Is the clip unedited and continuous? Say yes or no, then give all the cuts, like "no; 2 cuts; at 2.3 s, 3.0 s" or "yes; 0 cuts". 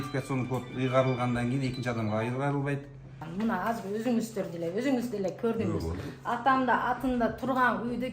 no; 1 cut; at 3.2 s